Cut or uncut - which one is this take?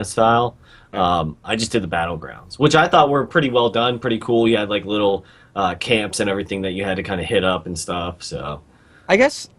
uncut